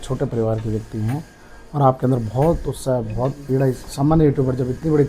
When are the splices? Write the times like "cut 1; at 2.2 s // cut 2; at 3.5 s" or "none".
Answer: cut 1; at 3.9 s